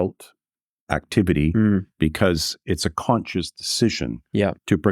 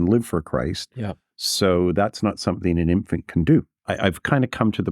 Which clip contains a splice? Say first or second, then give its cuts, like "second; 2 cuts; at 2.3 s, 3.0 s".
second; 1 cut; at 3.7 s